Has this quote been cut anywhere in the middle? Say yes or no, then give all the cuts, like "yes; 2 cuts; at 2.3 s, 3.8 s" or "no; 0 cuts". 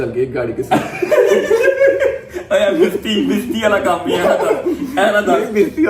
no; 0 cuts